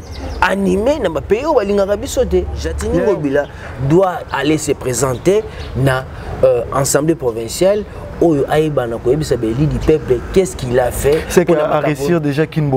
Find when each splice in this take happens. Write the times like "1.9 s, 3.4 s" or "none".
2.8 s